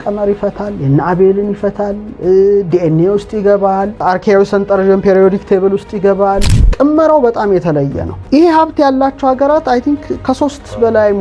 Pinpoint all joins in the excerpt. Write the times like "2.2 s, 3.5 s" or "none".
6.7 s